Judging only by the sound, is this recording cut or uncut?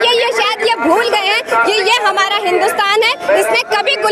uncut